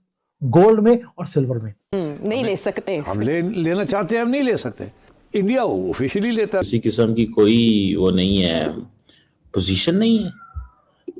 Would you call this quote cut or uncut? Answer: cut